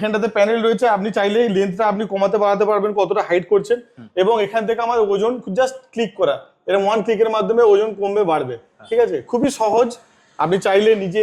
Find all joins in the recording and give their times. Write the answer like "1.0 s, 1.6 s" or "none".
none